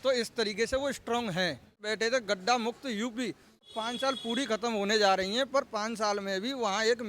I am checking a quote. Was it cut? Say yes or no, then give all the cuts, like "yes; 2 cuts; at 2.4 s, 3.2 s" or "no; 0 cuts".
yes; 2 cuts; at 1.9 s, 3.7 s